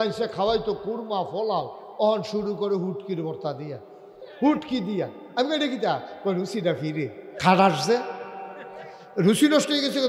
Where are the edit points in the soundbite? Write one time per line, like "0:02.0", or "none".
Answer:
none